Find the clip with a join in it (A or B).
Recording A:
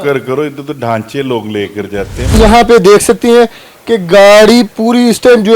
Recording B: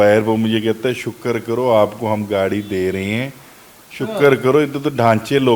A